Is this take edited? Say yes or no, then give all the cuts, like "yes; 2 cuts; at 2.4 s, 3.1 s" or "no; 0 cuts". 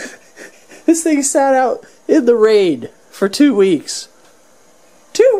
no; 0 cuts